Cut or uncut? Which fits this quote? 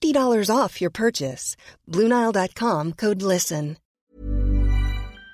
cut